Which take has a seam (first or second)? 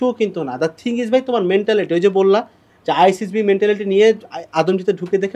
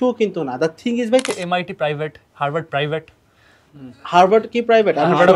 second